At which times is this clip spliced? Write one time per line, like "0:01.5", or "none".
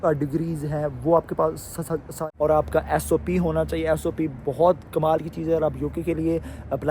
0:02.1